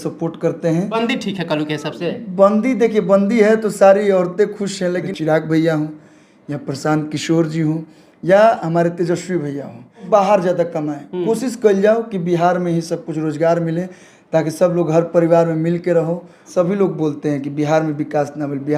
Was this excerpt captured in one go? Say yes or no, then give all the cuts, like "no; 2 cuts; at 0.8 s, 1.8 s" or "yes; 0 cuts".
no; 4 cuts; at 1.0 s, 5.1 s, 10.0 s, 16.5 s